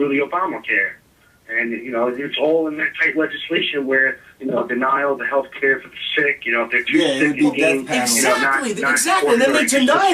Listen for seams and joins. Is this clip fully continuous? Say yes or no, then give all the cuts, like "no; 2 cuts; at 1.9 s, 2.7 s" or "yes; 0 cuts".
no; 1 cut; at 3.2 s